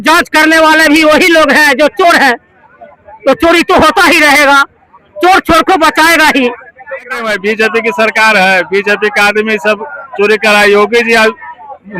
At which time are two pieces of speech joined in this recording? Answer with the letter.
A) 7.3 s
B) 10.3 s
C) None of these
A